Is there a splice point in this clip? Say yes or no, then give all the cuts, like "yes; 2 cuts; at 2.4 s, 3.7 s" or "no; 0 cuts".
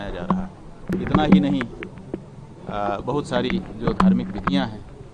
yes; 1 cut; at 0.9 s